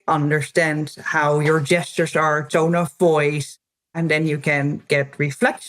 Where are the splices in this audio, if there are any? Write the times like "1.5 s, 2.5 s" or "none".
3.9 s